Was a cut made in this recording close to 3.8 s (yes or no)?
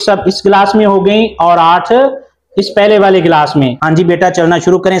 yes